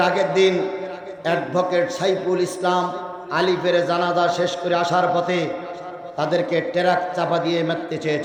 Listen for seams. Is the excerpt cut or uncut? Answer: uncut